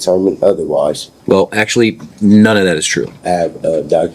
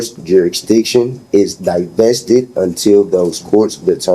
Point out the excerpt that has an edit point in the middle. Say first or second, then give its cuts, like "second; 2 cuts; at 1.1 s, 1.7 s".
first; 2 cuts; at 1.1 s, 3.2 s